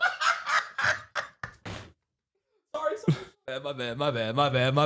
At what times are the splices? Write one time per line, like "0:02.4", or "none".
0:03.3